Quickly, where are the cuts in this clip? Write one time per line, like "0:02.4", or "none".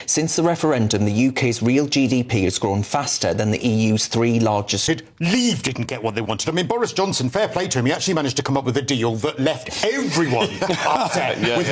0:04.8